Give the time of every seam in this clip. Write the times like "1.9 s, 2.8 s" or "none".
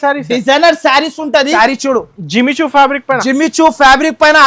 1.5 s